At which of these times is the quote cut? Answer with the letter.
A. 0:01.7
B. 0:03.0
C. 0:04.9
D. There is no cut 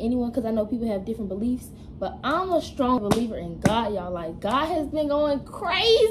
B